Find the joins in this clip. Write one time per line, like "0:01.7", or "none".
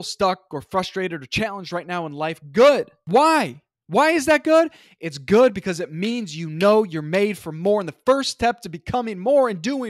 0:03.0

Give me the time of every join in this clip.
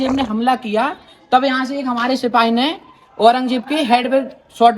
none

